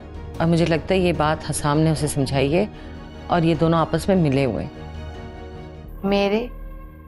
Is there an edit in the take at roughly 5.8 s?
yes; 1 cut; at 5.8 s

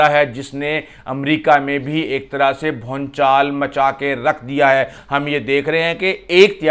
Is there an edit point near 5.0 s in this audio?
yes; 1 cut; at 5.0 s

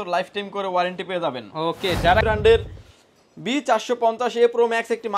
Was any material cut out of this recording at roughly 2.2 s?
yes; 1 cut; at 2.2 s

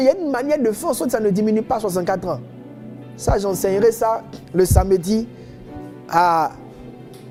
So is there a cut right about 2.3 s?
no; 0 cuts

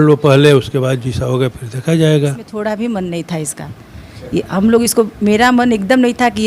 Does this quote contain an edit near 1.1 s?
no; 1 cut; at 2.5 s

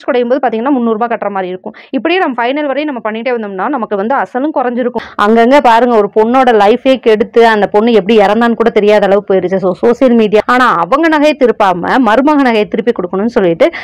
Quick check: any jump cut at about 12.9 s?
no; 2 cuts; at 5.0 s, 10.4 s

